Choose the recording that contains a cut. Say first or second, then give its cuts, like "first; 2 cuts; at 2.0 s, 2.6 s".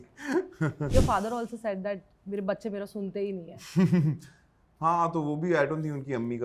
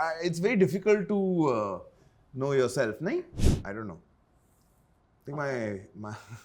second; 1 cut; at 3.3 s